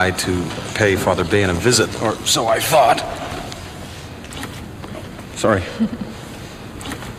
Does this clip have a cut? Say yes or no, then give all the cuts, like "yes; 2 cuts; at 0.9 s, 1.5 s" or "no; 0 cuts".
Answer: yes; 1 cut; at 4.7 s